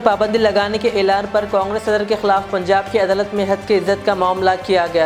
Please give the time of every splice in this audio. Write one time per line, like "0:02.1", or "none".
none